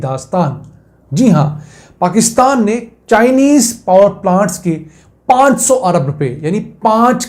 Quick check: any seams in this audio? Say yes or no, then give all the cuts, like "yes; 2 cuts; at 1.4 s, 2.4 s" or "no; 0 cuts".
no; 0 cuts